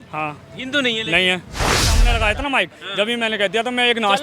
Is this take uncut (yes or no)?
no